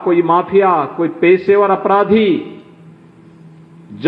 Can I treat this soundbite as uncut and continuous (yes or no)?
yes